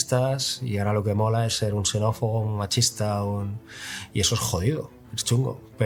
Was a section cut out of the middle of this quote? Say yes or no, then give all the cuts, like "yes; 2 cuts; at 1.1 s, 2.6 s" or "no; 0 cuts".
no; 0 cuts